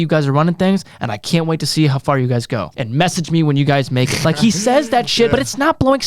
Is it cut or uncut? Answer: cut